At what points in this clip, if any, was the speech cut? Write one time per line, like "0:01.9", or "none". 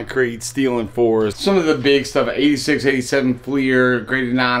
0:01.3